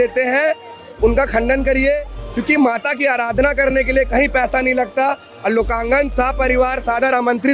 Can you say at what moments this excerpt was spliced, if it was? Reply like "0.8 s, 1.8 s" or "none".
none